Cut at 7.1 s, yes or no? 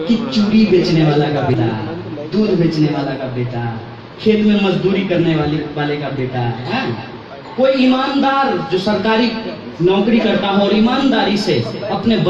no